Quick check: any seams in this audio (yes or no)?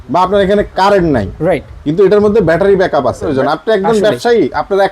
yes